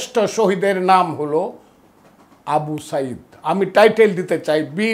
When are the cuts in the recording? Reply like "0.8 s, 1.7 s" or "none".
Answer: none

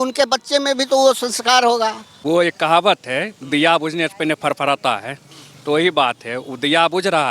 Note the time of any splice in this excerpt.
2.1 s

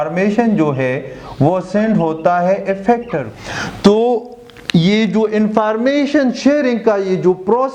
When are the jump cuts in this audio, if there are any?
3.2 s

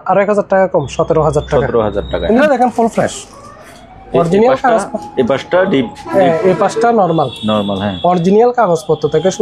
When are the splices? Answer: 2.4 s

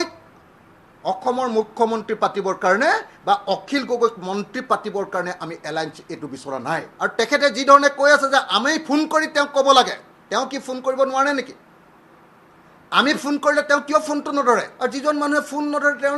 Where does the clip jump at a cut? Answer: 6.9 s, 14.7 s

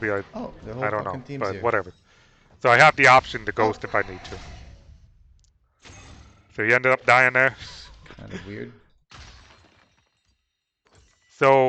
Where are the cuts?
none

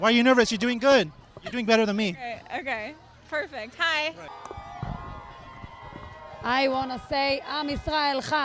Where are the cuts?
4.3 s

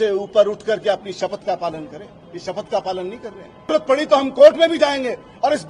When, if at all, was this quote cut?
3.7 s

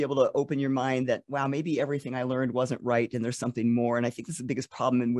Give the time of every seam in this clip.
none

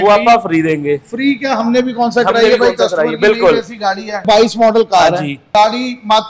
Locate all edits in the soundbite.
4.2 s, 5.4 s

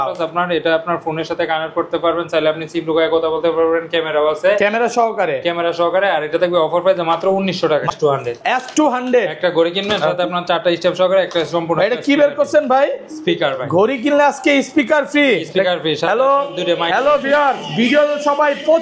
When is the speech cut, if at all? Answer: 8.0 s

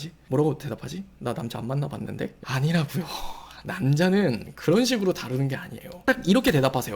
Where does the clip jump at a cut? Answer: 2.3 s, 6.0 s

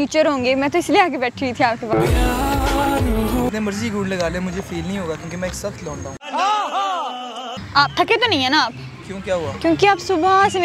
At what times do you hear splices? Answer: 3.5 s, 7.5 s

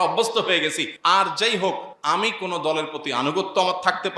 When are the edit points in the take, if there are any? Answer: 0.9 s, 1.9 s

